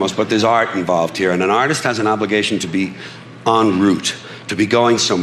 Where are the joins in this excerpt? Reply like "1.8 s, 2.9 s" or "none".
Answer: none